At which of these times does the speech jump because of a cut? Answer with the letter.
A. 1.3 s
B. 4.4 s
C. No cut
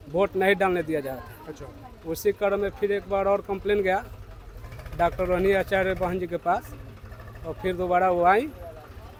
C